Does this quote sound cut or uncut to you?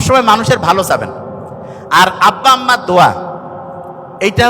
uncut